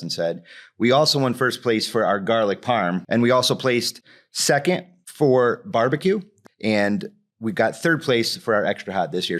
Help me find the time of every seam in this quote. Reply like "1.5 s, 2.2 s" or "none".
3.0 s, 5.0 s, 6.3 s